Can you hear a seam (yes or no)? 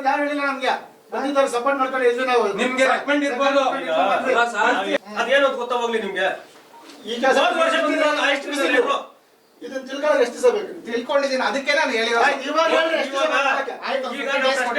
yes